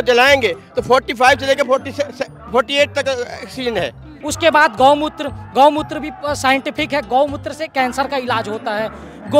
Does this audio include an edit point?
no; 0 cuts

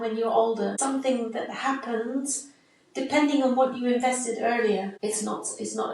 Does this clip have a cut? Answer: yes; 2 cuts; at 0.8 s, 4.9 s

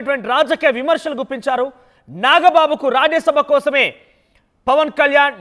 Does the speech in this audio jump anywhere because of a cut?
no; 0 cuts

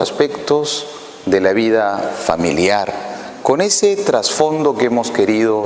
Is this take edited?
yes; 1 cut; at 3.3 s

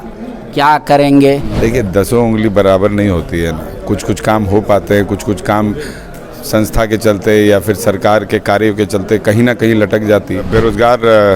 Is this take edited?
yes; 2 cuts; at 1.5 s, 10.5 s

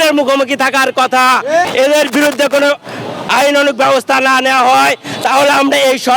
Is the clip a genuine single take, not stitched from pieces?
no; 1 cut; at 1.7 s

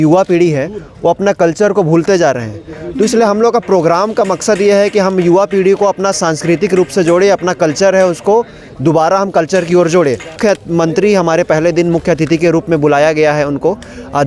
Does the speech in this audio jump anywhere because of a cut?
yes; 1 cut; at 10.4 s

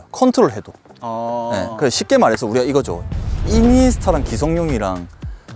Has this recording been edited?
no; 0 cuts

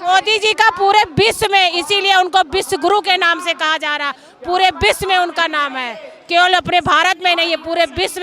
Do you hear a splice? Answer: no; 0 cuts

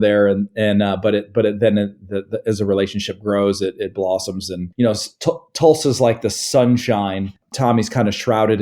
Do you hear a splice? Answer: yes; 1 cut; at 7.5 s

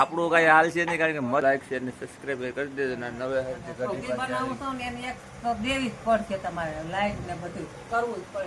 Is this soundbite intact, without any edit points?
no; 1 cut; at 1.4 s

